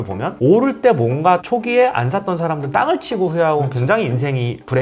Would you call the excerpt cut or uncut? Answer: uncut